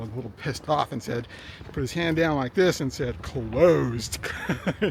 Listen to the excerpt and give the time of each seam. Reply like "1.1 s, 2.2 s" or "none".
none